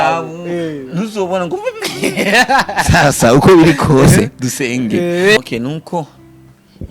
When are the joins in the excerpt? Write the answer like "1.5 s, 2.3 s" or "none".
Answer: 5.4 s